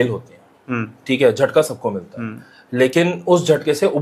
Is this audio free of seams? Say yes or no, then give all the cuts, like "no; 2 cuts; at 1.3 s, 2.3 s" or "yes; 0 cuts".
yes; 0 cuts